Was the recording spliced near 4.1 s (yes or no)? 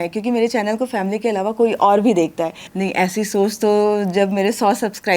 no